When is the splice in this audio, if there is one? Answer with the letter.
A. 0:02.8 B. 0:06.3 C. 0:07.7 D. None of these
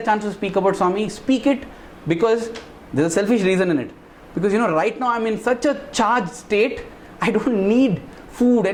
D